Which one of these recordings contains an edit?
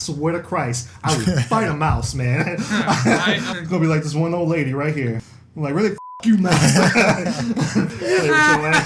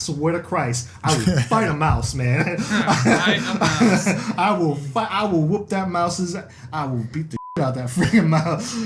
first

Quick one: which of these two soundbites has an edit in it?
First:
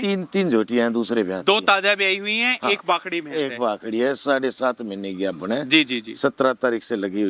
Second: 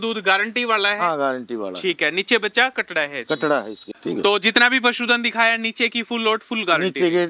second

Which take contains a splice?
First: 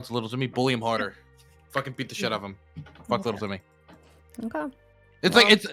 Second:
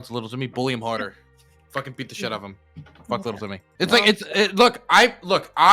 second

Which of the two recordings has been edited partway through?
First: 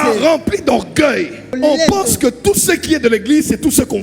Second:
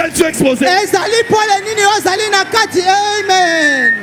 first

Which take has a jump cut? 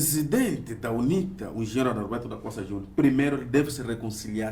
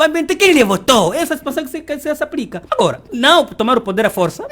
second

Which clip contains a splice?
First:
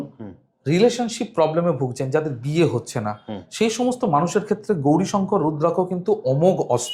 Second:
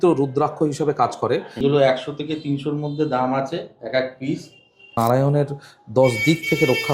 second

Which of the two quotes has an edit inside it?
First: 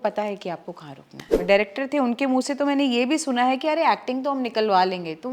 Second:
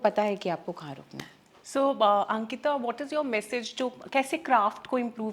first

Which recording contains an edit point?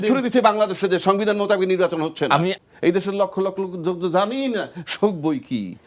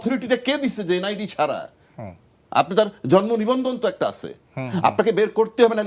first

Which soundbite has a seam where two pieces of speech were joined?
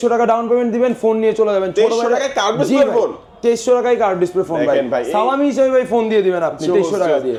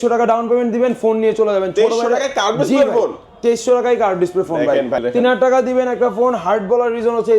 second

